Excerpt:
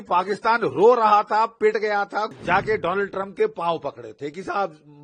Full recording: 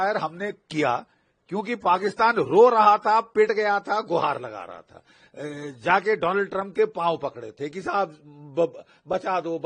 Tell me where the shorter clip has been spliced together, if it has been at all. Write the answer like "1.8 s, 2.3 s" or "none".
2.3 s